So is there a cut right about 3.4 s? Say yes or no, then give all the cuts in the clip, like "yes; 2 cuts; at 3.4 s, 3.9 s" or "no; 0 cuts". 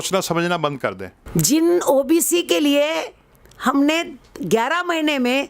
no; 1 cut; at 1.1 s